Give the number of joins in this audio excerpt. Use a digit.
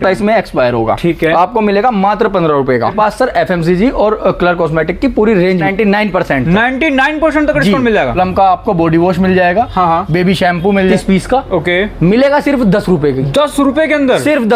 4